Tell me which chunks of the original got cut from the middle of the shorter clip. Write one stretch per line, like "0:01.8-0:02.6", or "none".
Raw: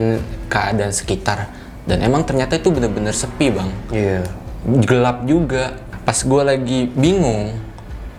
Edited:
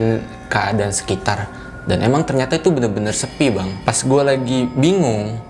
0:03.7-0:05.9